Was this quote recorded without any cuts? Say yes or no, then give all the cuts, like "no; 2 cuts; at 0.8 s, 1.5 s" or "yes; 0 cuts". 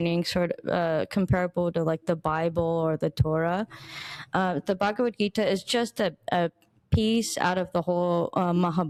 yes; 0 cuts